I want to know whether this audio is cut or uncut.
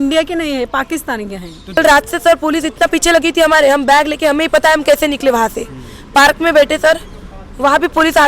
cut